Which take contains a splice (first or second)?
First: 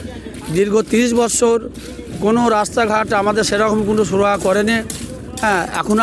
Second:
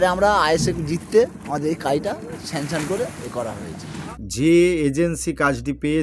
second